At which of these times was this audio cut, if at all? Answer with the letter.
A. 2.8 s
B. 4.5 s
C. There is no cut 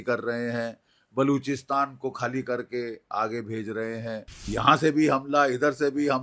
B